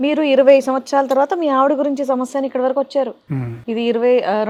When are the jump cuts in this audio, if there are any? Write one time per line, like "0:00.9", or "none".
none